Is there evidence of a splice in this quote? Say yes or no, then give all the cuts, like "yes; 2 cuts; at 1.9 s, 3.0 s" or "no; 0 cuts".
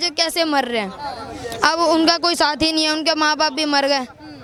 no; 0 cuts